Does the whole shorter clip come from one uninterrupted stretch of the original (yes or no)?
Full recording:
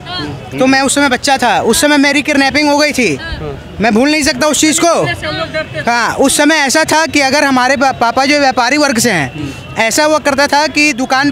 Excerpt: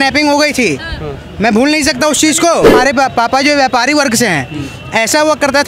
no